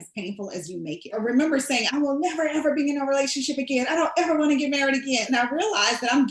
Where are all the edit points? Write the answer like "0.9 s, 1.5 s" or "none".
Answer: 1.0 s, 5.2 s